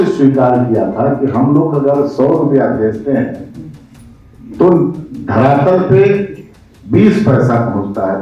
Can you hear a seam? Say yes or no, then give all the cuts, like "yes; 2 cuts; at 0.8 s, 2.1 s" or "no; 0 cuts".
no; 0 cuts